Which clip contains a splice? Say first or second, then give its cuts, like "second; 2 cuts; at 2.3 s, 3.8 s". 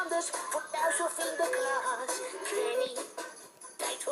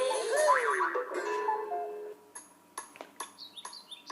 second; 1 cut; at 2.0 s